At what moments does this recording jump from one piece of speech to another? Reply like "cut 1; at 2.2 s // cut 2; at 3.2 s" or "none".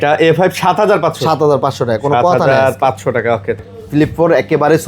cut 1; at 3.6 s